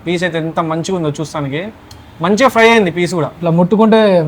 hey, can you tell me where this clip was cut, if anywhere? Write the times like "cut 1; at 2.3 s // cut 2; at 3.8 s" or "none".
cut 1; at 3.3 s

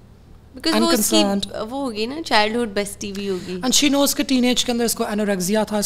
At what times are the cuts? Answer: none

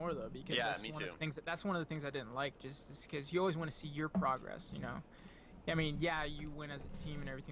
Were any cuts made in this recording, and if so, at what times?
cut 1; at 5.9 s

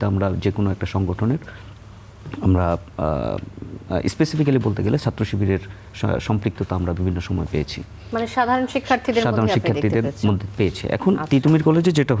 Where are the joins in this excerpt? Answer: none

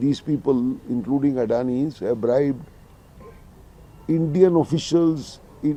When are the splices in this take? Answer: none

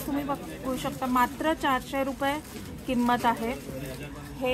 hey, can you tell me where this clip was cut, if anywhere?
none

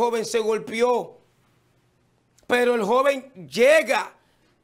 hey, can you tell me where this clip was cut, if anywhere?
none

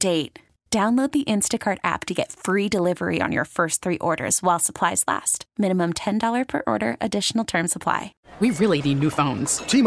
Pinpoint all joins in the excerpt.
cut 1; at 8.2 s

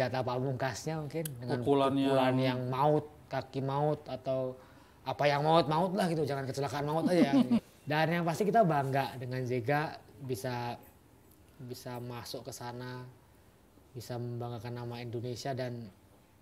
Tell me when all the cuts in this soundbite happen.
cut 1; at 7.7 s

